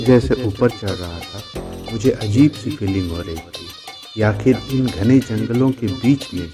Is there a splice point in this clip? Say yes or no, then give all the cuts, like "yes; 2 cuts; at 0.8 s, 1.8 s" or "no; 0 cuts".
no; 0 cuts